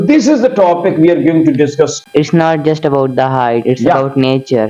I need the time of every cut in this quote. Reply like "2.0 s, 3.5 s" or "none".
2.0 s